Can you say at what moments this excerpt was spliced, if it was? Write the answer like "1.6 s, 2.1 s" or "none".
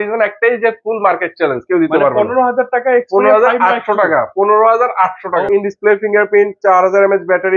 5.5 s

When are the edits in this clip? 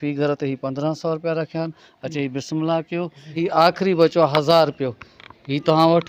3.4 s

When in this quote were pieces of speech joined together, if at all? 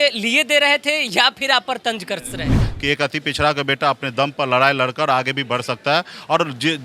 2.6 s

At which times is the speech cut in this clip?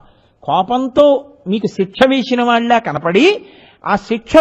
none

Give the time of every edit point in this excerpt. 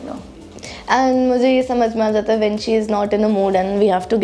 none

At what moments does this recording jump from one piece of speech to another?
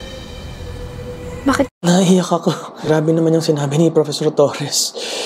1.7 s

